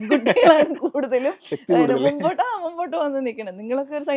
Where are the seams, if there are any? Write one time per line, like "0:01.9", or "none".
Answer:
none